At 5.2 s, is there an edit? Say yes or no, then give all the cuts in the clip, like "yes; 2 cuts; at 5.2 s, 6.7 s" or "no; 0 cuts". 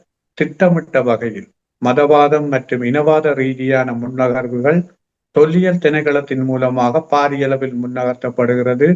no; 0 cuts